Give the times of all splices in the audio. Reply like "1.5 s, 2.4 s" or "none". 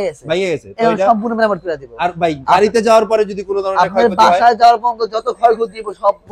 none